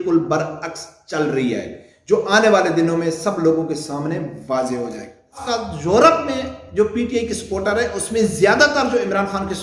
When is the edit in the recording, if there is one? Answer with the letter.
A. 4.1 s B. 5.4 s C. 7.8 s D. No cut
B